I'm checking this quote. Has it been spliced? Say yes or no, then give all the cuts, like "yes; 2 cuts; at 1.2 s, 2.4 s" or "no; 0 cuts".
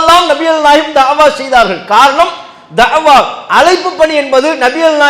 no; 0 cuts